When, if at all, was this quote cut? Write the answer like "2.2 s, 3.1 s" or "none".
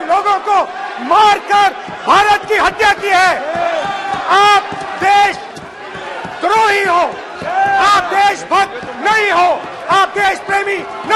none

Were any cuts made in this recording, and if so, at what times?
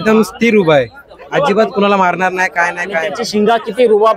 3.2 s

